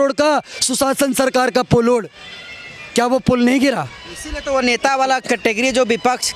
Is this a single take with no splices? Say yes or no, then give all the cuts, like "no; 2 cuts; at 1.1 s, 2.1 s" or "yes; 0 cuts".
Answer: yes; 0 cuts